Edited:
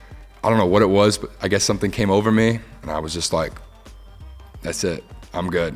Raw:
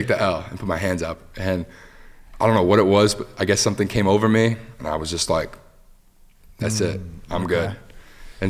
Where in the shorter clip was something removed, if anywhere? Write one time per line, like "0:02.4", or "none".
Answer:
none